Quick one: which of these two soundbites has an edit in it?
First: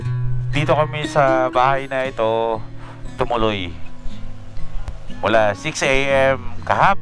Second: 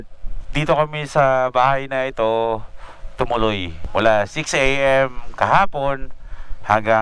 second; 1 cut; at 3.8 s

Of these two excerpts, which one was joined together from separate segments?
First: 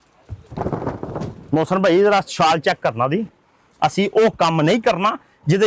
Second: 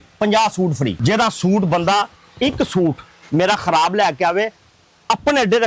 second; 1 cut; at 1.0 s

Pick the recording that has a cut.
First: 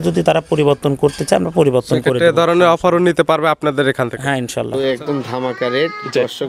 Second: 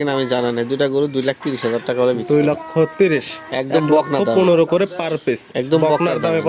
first; 1 cut; at 4.7 s

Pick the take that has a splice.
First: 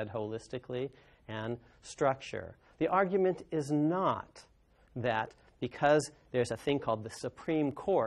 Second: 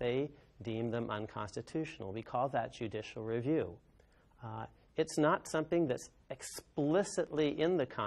second; 1 cut; at 1.2 s

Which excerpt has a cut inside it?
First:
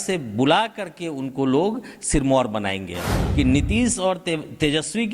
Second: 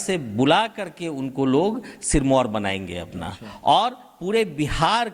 first; 1 cut; at 3.2 s

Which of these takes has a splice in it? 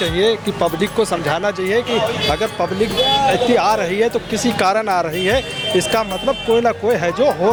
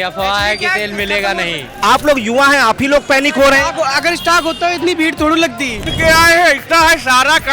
second; 2 cuts; at 1.7 s, 5.9 s

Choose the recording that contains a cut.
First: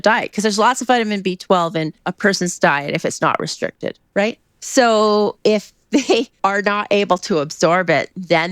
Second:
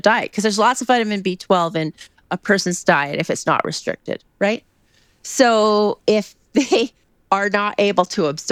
first; 3 cuts; at 2.0 s, 4.5 s, 6.3 s

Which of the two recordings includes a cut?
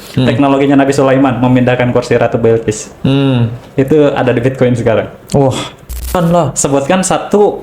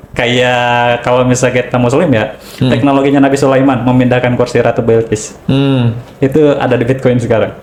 first; 1 cut; at 6.1 s

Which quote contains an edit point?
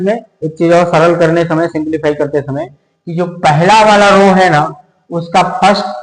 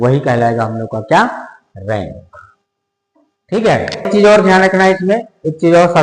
second; 1 cut; at 4.1 s

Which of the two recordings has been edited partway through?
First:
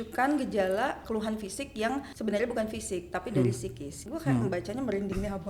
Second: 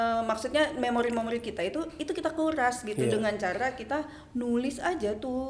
first; 3 cuts; at 1.0 s, 2.1 s, 4.1 s

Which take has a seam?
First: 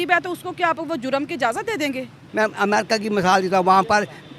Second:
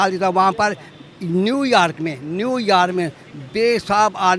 first; 1 cut; at 2.2 s

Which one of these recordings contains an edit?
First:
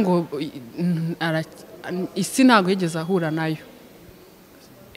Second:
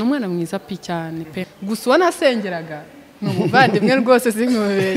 second; 1 cut; at 1.5 s

